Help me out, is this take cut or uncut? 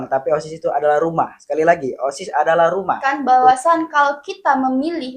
cut